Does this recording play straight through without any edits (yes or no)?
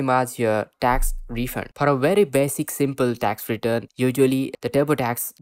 no